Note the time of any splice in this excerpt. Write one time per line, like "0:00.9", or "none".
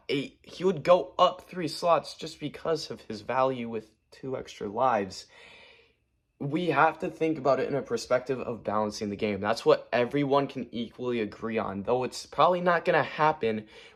none